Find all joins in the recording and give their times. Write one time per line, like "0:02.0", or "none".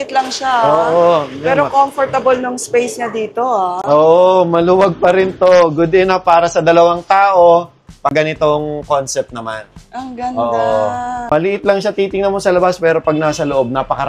none

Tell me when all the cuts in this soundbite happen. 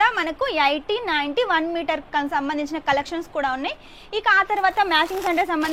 none

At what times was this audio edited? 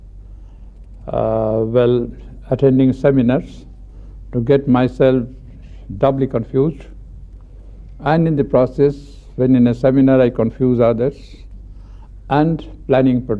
0:01.0

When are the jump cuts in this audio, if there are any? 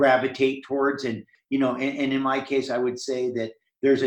0:01.3

